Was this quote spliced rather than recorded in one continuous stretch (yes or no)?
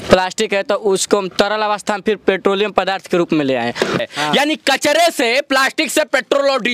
yes